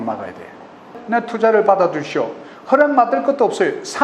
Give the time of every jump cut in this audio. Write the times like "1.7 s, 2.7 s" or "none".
1.0 s